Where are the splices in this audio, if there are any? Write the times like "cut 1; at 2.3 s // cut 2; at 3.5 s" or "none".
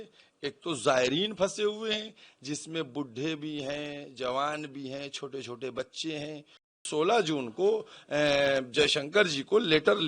cut 1; at 6.8 s

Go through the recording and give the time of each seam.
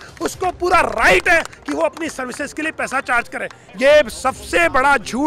cut 1; at 3.6 s

